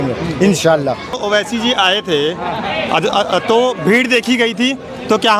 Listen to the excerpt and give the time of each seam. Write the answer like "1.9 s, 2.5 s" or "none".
1.1 s